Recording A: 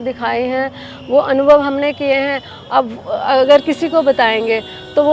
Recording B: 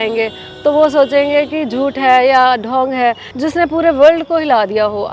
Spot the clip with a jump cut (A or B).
B